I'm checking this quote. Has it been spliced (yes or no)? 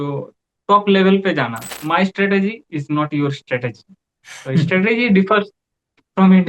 yes